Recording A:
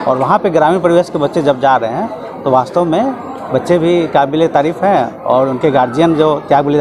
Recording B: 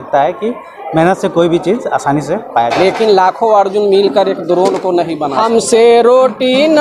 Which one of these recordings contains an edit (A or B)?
B